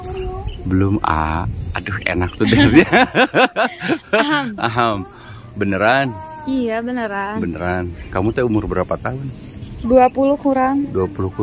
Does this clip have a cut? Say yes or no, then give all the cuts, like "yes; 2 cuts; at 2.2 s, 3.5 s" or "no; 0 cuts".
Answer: no; 0 cuts